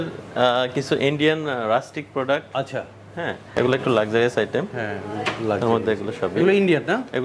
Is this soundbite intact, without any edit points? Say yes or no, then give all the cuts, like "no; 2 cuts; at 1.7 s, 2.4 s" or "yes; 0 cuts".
no; 1 cut; at 3.5 s